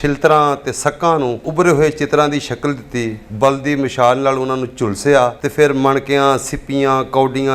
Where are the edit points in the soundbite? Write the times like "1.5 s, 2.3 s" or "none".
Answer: 1.5 s, 5.4 s